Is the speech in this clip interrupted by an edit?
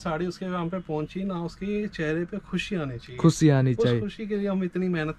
no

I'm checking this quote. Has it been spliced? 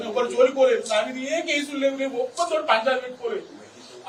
no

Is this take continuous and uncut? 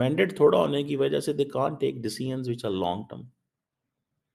yes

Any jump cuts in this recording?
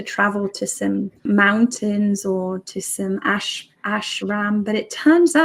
yes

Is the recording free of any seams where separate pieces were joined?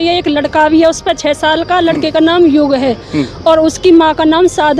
yes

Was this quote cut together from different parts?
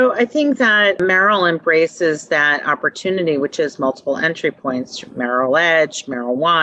yes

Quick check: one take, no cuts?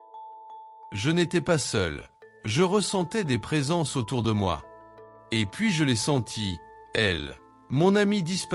no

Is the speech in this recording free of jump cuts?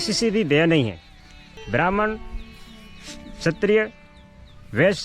no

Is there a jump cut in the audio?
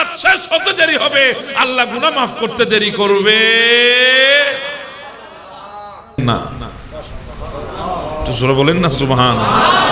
yes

